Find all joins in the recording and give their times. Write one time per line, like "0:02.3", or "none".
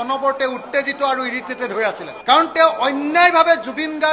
0:02.1